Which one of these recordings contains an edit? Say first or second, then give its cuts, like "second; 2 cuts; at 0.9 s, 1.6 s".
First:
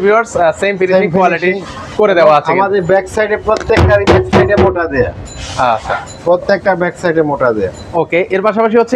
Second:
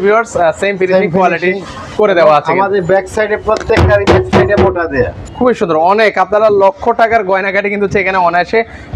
second; 1 cut; at 5.2 s